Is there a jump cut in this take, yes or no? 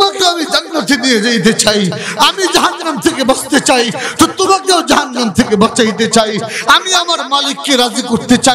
no